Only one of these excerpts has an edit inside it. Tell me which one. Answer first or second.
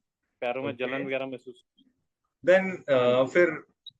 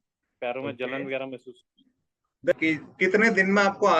second